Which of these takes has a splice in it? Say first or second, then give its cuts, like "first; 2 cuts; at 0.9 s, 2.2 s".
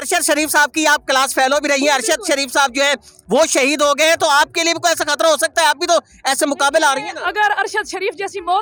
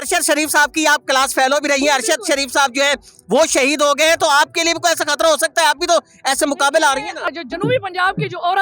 second; 1 cut; at 7.3 s